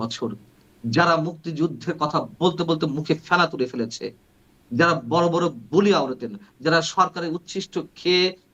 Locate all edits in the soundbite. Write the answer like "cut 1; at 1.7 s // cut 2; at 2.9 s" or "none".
none